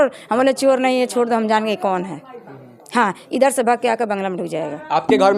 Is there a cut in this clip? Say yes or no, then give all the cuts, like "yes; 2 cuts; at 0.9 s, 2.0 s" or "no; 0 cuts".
no; 0 cuts